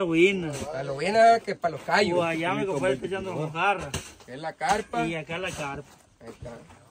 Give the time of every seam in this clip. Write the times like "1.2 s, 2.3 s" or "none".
none